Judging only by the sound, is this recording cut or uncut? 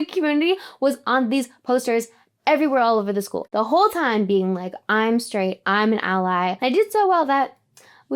cut